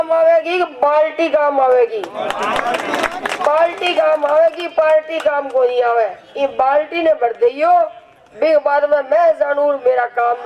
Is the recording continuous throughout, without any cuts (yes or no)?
yes